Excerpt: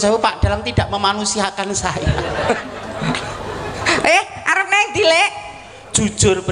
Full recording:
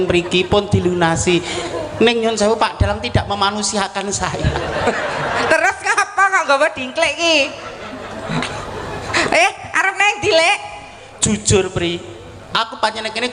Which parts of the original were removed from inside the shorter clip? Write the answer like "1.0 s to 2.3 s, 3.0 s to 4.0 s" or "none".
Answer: 5.0 s to 7.9 s